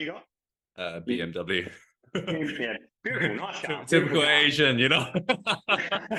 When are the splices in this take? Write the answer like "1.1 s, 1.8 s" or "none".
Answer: none